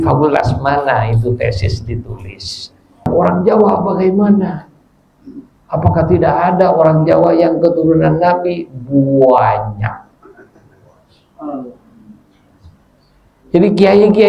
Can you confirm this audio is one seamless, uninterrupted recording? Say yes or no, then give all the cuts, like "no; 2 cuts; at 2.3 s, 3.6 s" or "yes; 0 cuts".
no; 1 cut; at 3.1 s